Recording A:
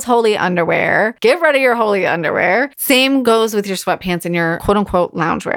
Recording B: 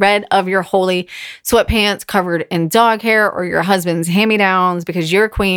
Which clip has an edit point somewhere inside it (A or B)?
A